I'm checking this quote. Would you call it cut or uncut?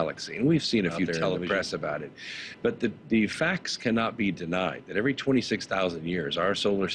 cut